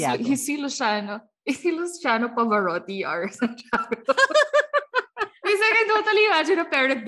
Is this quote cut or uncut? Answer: uncut